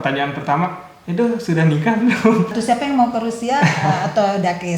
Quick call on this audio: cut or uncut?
cut